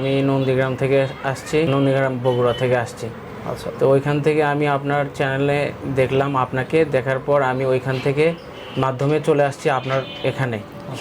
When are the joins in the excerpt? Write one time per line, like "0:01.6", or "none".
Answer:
0:01.7